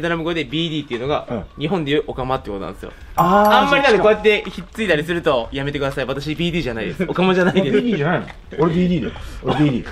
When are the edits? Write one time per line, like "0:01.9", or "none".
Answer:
none

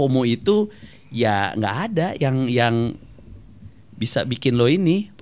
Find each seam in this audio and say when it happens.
none

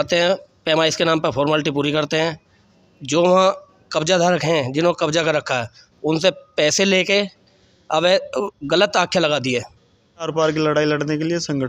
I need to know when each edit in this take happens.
0:10.3

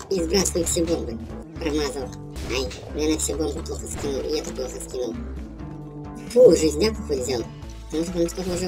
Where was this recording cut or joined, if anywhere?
0:01.4
0:02.3

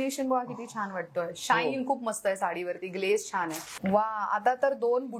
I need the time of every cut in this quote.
0:03.6

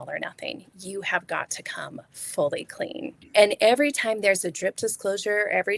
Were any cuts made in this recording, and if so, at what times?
0:03.2

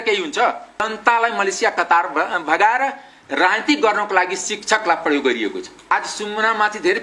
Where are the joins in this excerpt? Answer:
0:01.0
0:05.9

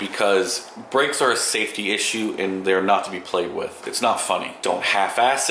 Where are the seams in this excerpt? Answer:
none

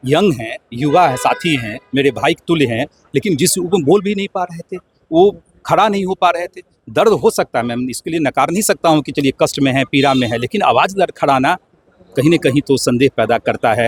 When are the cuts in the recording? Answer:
none

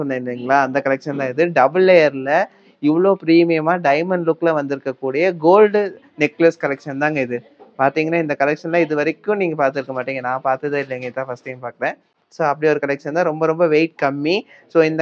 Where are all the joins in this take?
none

